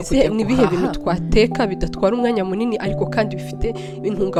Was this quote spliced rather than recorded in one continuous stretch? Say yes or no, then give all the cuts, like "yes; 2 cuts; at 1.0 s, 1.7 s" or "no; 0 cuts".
no; 0 cuts